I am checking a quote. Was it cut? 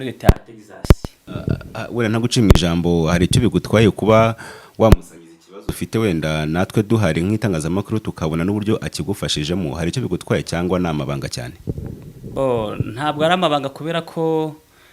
yes; 1 cut; at 1.1 s

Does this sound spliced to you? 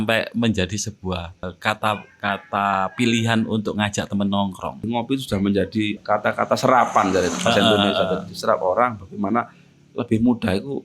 yes; 3 cuts; at 1.5 s, 4.8 s, 6.0 s

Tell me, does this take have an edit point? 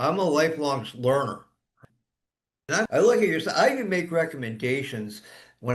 yes; 1 cut; at 1.8 s

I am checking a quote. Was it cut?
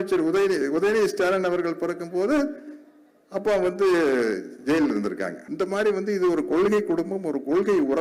yes; 1 cut; at 5.4 s

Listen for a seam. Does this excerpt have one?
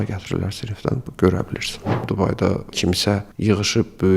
yes; 1 cut; at 2.1 s

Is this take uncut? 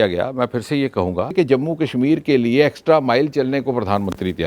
no; 1 cut; at 1.3 s

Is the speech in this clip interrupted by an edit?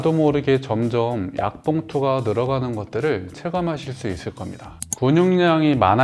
yes; 1 cut; at 4.7 s

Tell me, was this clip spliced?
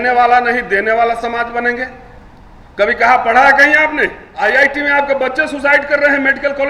yes; 1 cut; at 4.2 s

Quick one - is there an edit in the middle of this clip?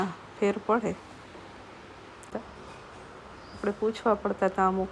yes; 1 cut; at 2.3 s

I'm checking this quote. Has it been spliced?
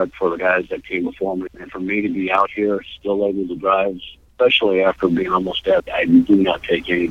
yes; 1 cut; at 5.8 s

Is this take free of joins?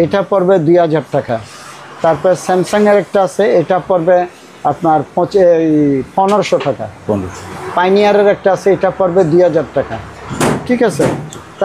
yes; 0 cuts

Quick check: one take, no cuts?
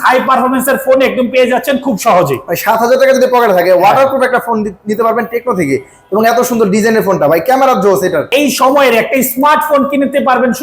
no; 1 cut; at 8.3 s

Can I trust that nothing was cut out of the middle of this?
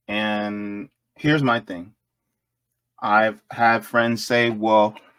yes; 0 cuts

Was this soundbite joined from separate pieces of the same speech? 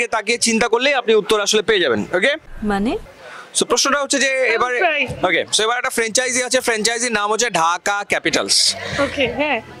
no; 0 cuts

